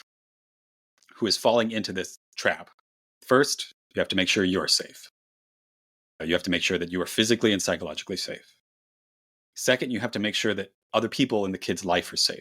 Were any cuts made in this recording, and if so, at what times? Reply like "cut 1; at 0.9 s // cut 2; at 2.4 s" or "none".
none